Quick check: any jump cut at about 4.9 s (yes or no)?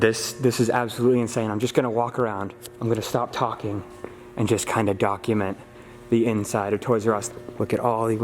no